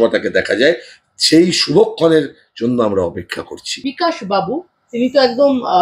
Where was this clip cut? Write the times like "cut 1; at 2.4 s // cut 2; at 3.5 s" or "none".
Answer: cut 1; at 3.9 s